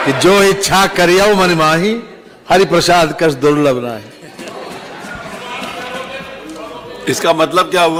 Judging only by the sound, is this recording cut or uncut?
uncut